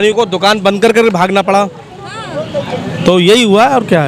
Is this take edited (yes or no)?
no